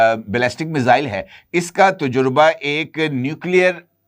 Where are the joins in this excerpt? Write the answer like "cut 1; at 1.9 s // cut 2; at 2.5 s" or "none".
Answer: none